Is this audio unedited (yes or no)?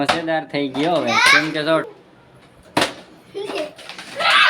no